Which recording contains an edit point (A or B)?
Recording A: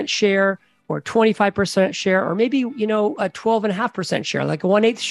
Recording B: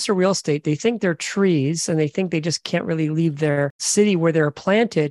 B